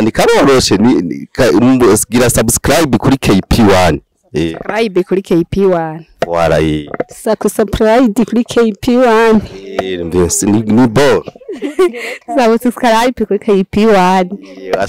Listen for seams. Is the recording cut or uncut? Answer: uncut